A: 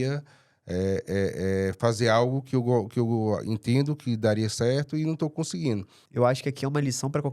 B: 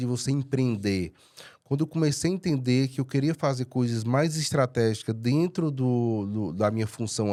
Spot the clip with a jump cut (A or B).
A